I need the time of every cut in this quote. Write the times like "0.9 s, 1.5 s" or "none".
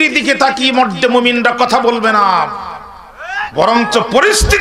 none